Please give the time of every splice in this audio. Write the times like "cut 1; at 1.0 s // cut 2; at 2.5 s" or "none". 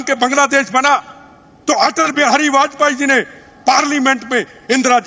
none